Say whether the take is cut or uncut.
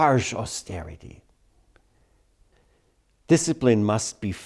cut